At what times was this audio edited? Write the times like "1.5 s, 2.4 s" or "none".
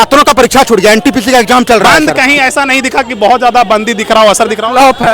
2.0 s